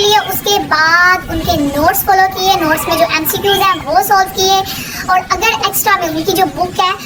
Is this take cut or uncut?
uncut